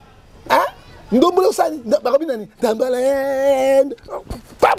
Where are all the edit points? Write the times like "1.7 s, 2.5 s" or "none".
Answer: none